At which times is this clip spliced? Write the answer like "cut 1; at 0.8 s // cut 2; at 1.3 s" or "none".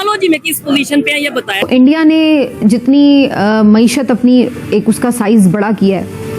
cut 1; at 1.6 s

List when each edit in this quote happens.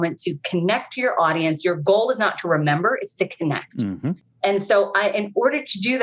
cut 1; at 4.3 s

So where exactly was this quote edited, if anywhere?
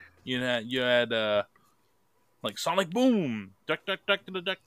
none

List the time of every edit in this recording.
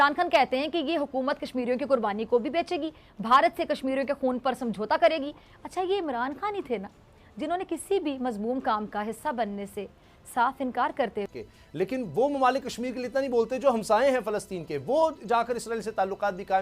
cut 1; at 11.4 s

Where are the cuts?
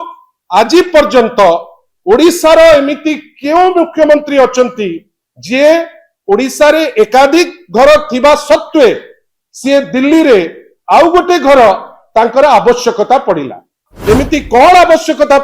cut 1; at 13.9 s

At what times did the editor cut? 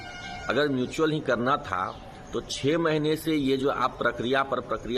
none

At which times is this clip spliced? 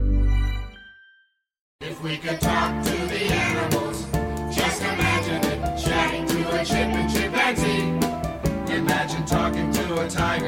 cut 1; at 1.9 s

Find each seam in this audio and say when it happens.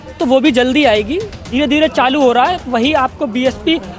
cut 1; at 1.5 s

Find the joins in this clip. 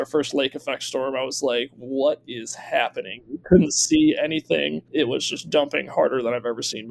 none

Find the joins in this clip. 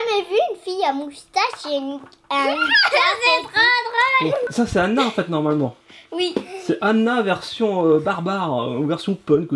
cut 1; at 4.5 s

